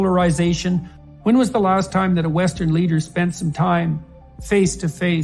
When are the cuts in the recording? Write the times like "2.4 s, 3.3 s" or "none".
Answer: 0.9 s